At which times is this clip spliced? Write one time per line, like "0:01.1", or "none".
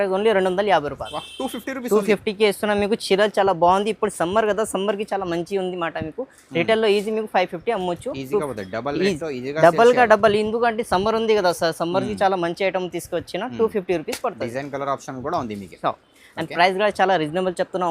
0:16.1